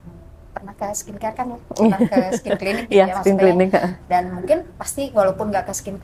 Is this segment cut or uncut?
uncut